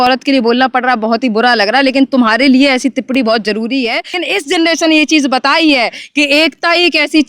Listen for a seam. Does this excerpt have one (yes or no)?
yes